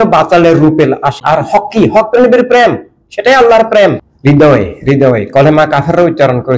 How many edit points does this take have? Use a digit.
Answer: 2